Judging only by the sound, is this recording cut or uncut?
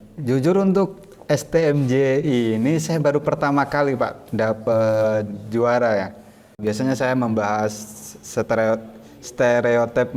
cut